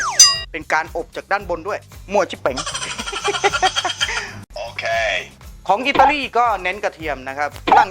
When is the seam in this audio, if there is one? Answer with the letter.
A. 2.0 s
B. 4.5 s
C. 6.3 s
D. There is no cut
B